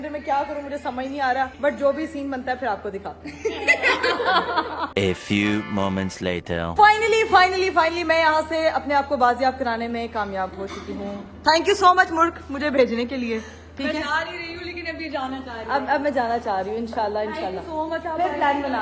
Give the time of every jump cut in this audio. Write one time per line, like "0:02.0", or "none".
none